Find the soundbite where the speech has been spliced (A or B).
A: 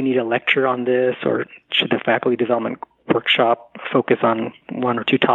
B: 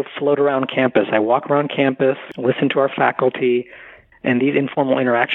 B